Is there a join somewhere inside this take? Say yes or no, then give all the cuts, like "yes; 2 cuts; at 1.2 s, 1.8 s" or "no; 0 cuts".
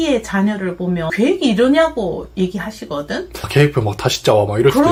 no; 0 cuts